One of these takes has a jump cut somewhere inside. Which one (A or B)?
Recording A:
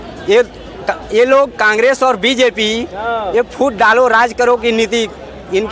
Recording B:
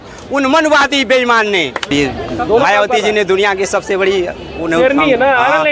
B